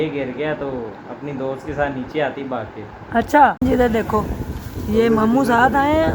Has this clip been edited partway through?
yes; 1 cut; at 3.6 s

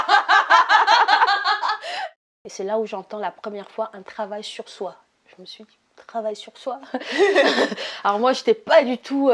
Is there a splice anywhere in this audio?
yes; 1 cut; at 1.9 s

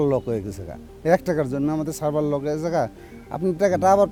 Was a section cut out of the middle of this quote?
no; 0 cuts

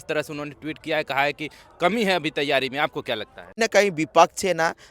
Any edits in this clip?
yes; 1 cut; at 3.6 s

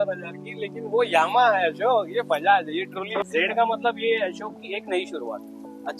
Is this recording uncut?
no; 1 cut; at 3.2 s

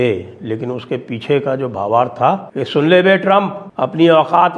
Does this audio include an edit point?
yes; 2 cuts; at 2.5 s, 3.6 s

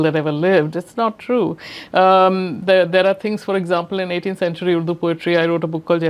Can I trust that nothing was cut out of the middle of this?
yes; 0 cuts

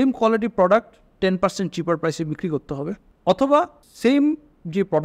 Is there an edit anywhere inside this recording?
yes; 2 cuts; at 3.1 s, 3.8 s

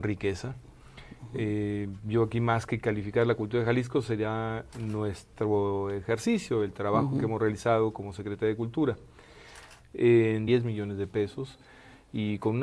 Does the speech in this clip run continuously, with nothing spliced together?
yes; 0 cuts

